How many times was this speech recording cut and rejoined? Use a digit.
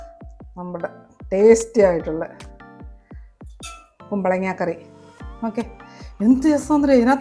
2